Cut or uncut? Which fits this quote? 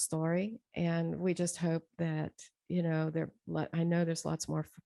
uncut